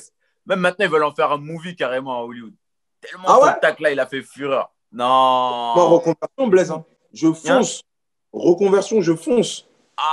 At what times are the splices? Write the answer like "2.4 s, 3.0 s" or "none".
none